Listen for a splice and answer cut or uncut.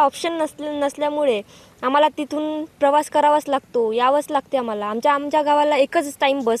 uncut